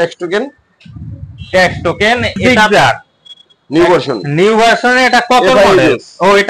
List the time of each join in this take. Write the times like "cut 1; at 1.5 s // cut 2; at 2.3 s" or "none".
cut 1; at 2.5 s